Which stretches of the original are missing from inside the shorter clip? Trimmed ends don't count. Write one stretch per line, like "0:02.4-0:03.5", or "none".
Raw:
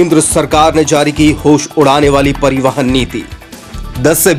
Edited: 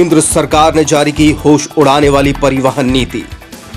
none